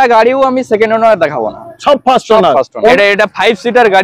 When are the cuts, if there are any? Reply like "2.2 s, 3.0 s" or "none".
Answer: 2.9 s